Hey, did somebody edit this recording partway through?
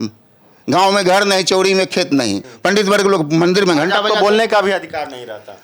yes; 1 cut; at 2.5 s

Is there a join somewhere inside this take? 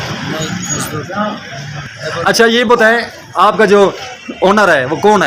no; 0 cuts

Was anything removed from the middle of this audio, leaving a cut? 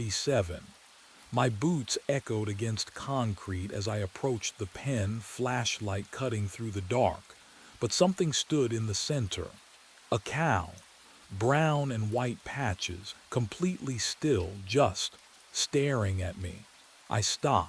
no; 0 cuts

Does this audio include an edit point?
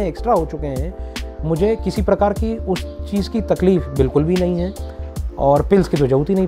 yes; 1 cut; at 5.0 s

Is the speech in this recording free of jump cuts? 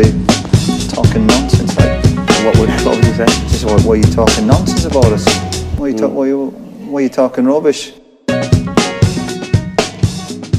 yes; 0 cuts

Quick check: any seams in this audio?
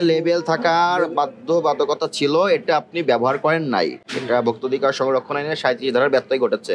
no; 0 cuts

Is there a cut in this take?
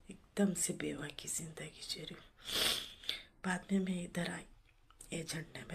no; 0 cuts

